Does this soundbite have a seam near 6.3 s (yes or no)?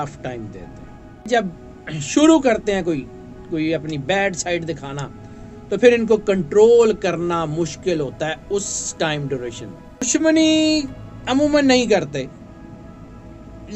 no